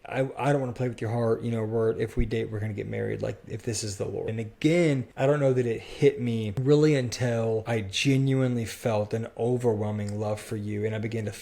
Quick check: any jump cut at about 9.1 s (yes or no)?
no